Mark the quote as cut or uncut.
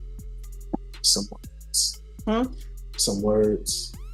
uncut